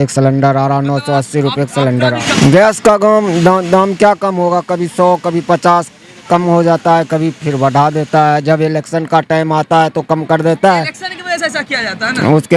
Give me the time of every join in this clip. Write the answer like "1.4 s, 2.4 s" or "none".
2.1 s